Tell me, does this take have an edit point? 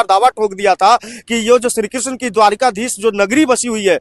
no; 0 cuts

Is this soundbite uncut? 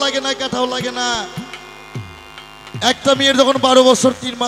yes; 0 cuts

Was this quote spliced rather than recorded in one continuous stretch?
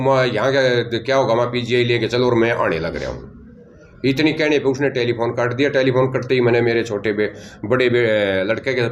no; 0 cuts

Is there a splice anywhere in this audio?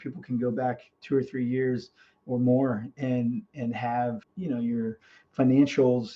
yes; 1 cut; at 4.3 s

